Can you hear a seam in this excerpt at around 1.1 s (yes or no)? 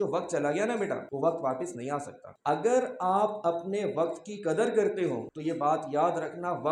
yes